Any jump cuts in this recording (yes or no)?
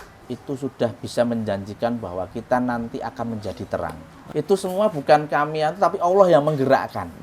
yes